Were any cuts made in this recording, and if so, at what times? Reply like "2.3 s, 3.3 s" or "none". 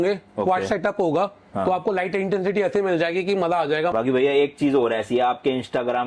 3.9 s